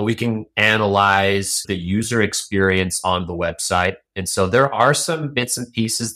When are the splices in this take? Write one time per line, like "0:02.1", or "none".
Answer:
0:01.6
0:04.1